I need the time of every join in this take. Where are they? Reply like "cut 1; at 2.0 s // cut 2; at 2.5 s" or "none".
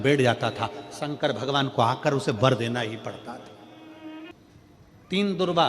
cut 1; at 4.3 s